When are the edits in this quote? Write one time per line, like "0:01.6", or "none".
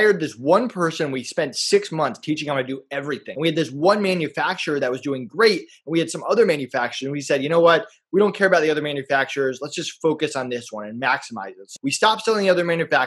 0:03.3
0:11.7